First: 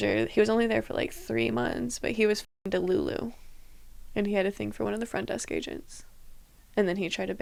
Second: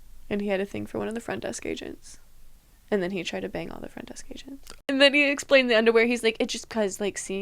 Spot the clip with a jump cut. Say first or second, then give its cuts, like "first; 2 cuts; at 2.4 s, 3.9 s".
second; 1 cut; at 4.7 s